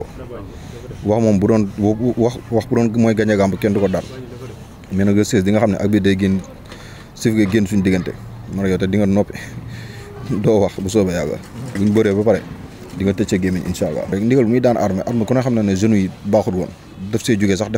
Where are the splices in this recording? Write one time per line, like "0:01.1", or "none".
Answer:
0:14.1